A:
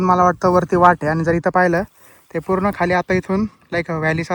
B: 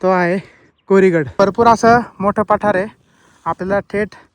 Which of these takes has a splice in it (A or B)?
B